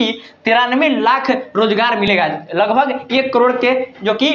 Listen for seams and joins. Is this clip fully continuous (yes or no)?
yes